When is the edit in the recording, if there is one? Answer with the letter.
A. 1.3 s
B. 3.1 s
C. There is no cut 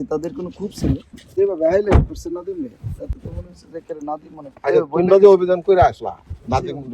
A